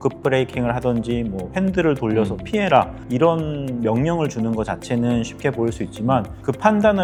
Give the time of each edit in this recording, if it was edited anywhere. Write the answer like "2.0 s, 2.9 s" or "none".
none